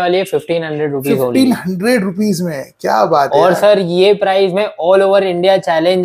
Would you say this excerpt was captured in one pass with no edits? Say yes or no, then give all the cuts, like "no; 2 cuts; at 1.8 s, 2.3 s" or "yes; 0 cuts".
yes; 0 cuts